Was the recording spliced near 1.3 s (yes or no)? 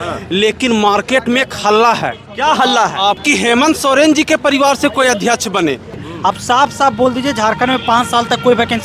no